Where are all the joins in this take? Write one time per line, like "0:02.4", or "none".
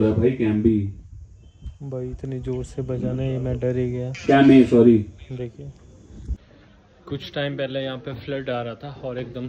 0:06.4